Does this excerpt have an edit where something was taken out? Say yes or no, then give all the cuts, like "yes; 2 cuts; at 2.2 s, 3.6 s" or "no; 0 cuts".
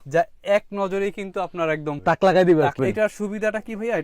yes; 1 cut; at 2.8 s